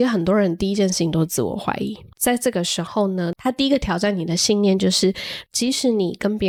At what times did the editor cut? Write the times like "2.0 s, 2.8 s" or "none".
none